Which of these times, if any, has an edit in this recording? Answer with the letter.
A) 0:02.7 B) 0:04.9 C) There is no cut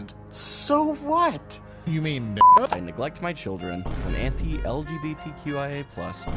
A